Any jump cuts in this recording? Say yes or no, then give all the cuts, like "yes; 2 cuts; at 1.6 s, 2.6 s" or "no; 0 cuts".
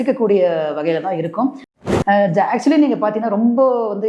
yes; 1 cut; at 1.7 s